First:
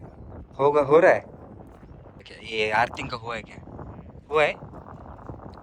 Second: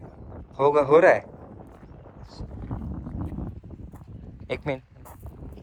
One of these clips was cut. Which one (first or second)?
first